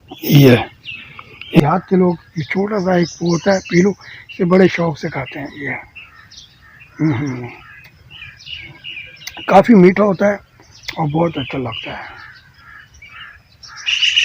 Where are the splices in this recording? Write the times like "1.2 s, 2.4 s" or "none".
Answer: 1.6 s